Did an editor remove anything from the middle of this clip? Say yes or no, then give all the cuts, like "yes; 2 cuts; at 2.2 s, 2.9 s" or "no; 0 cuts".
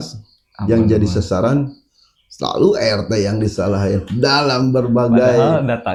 no; 0 cuts